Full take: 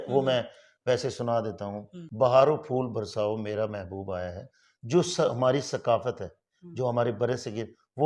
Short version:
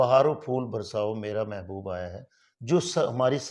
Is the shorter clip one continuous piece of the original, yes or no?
yes